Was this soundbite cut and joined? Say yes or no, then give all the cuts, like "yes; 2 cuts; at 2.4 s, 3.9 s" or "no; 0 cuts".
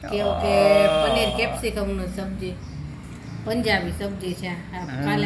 no; 0 cuts